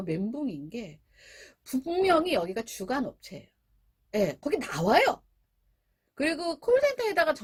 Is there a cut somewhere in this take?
no; 0 cuts

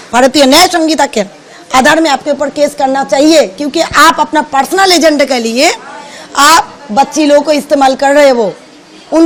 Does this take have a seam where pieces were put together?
no; 0 cuts

